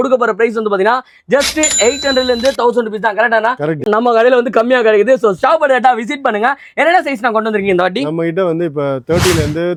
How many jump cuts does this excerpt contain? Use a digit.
0